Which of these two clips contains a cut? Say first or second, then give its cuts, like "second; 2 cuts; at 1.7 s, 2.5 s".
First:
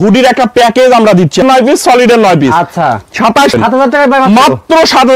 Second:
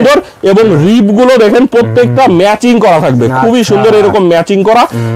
first; 2 cuts; at 1.4 s, 3.6 s